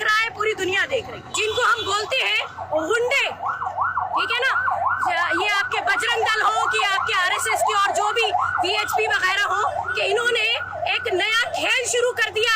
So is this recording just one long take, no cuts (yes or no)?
no